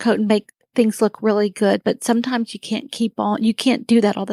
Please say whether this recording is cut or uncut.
uncut